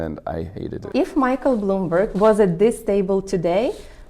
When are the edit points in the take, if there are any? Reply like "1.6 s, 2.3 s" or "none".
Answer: 0.8 s, 2.1 s